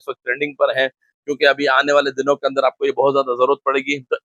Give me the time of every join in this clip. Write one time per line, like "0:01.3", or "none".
none